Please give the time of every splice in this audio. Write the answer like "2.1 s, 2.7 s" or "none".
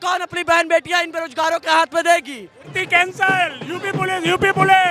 2.7 s